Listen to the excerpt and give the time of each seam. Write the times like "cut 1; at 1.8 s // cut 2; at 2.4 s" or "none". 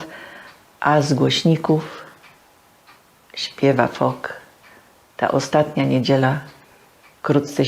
none